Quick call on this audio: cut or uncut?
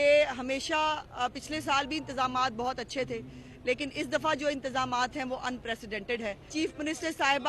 cut